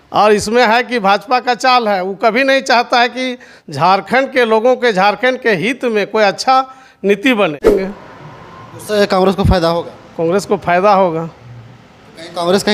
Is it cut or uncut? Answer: cut